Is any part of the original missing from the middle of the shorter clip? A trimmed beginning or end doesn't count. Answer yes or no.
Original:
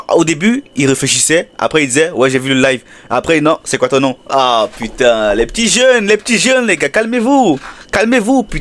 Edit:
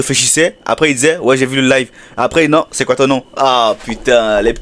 no